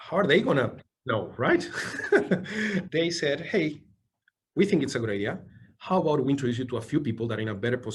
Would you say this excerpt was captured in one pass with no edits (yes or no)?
yes